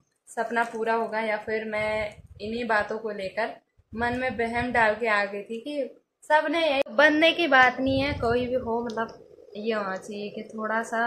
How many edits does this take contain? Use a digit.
1